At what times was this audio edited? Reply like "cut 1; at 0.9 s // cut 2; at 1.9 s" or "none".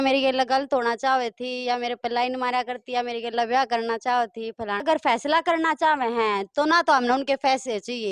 cut 1; at 4.8 s